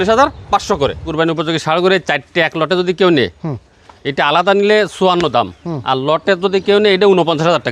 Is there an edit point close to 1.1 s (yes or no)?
yes